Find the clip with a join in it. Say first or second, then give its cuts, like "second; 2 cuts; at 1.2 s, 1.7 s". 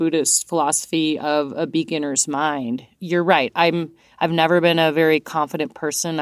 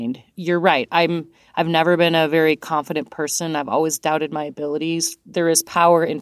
second; 1 cut; at 5.1 s